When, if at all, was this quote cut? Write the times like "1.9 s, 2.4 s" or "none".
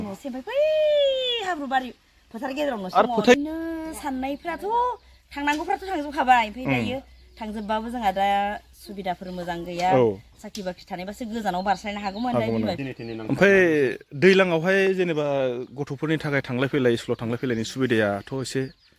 3.3 s, 12.8 s

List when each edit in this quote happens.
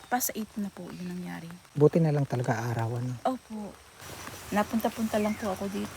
3.8 s

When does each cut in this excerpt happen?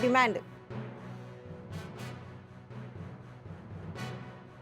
none

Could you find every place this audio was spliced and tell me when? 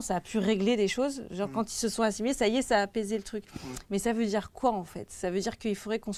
none

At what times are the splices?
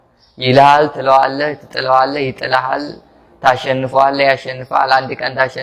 none

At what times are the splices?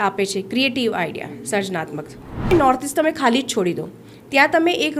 2.5 s

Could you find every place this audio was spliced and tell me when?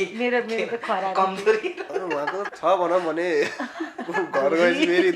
2.5 s

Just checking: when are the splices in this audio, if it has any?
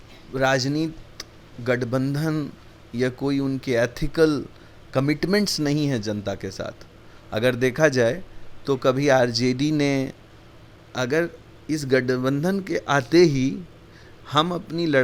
10.9 s

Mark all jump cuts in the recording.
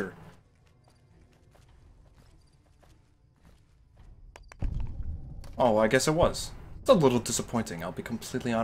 6.7 s

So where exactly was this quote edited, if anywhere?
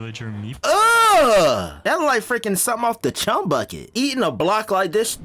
1.8 s, 3.8 s

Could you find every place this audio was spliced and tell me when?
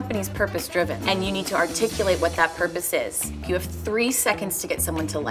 1.0 s, 3.4 s

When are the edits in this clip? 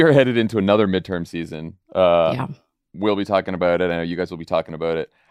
none

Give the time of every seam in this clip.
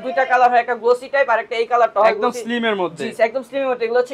none

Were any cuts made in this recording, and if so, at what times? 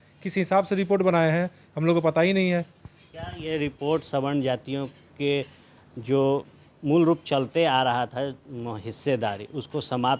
none

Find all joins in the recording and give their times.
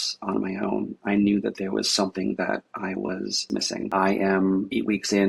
3.9 s

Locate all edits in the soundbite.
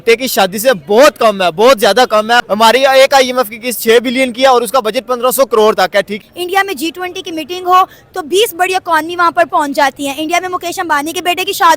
6.2 s

